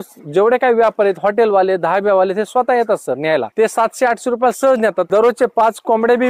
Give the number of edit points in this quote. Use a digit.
2